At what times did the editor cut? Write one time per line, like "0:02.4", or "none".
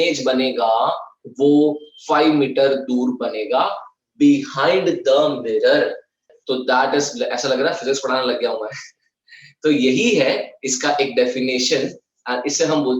0:06.3